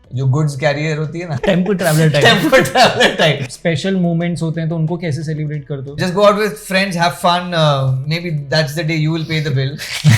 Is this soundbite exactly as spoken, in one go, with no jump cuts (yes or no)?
no